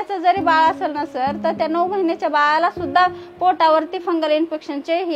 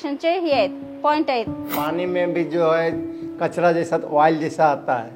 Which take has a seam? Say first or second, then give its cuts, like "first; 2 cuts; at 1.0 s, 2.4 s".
second; 1 cut; at 1.7 s